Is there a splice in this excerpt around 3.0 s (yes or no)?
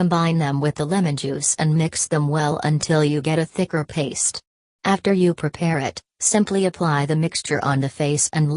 yes